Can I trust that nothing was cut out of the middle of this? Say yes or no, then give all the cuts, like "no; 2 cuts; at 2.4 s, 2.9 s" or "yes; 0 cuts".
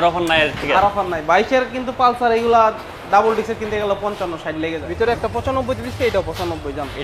no; 1 cut; at 4.8 s